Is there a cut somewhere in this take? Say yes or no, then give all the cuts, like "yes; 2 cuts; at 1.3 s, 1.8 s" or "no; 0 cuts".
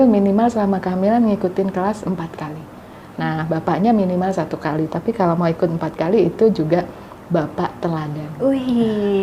no; 0 cuts